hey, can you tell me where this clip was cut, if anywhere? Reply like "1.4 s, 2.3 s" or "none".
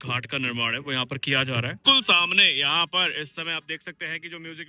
1.8 s